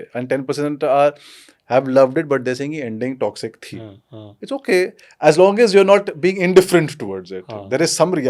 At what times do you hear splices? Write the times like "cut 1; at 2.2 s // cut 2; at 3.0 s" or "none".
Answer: none